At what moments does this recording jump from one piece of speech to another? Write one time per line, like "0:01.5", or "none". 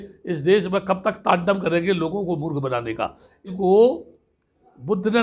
0:03.5

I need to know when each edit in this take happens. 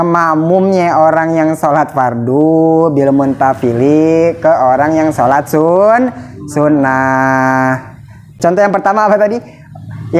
0:08.3

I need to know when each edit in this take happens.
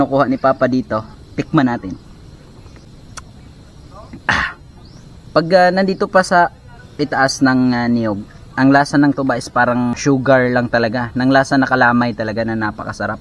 0:02.9
0:09.9

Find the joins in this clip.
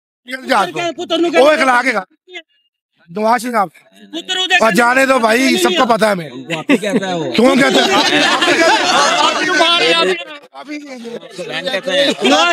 none

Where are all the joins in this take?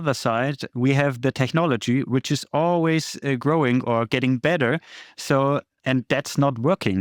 0:05.8

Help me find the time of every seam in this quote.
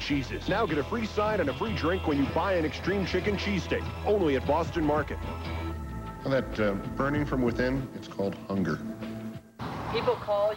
0:09.5

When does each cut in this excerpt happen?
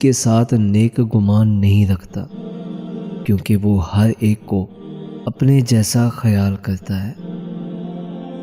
0:07.2

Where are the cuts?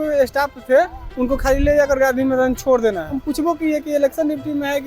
0:03.2

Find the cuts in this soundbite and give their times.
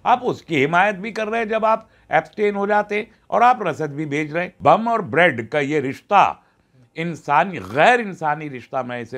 0:04.6

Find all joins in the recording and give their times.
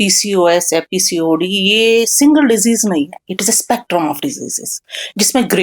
none

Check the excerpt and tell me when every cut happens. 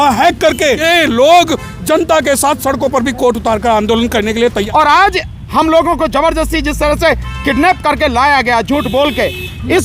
0:00.8
0:04.6

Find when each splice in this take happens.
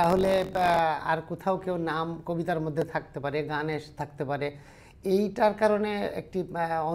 none

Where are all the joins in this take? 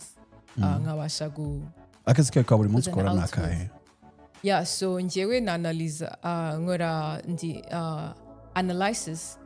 none

